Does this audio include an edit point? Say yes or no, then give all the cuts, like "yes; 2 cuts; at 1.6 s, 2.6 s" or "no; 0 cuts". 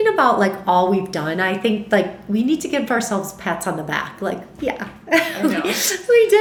no; 0 cuts